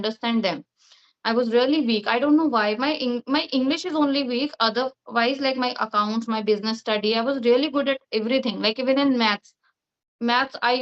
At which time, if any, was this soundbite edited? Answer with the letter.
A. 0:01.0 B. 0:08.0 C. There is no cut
C